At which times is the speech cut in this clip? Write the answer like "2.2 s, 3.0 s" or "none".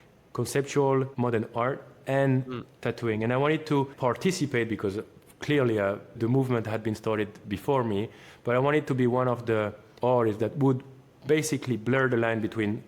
1.1 s, 3.9 s, 9.8 s

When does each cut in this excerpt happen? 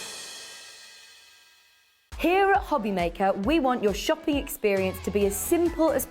1.9 s

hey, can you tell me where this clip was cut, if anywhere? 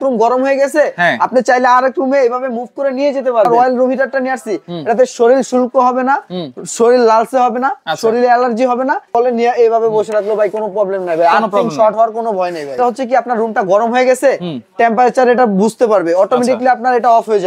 3.5 s, 9.1 s, 12.8 s

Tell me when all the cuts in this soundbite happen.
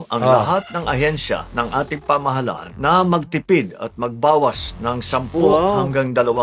none

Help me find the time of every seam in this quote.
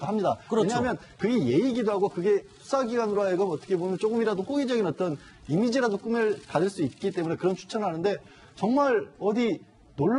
none

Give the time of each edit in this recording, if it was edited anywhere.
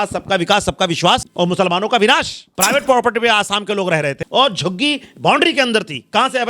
1.3 s, 2.4 s, 4.2 s

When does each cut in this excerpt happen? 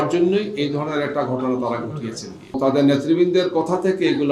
2.6 s

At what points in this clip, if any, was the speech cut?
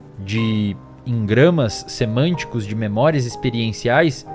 none

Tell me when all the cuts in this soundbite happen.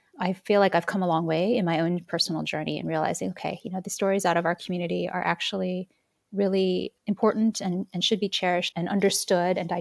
8.7 s

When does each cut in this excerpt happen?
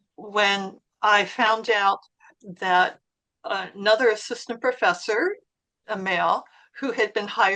none

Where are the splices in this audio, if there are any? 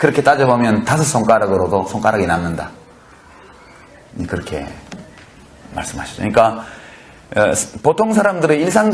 5.5 s

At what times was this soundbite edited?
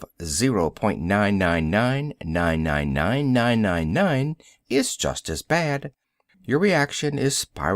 5.4 s

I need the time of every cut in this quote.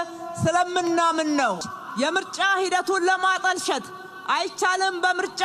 1.7 s

